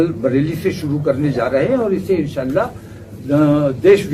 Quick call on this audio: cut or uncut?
uncut